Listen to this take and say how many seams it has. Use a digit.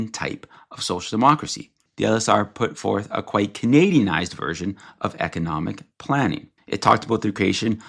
2